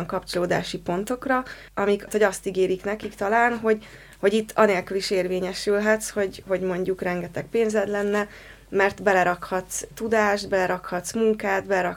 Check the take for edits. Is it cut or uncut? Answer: cut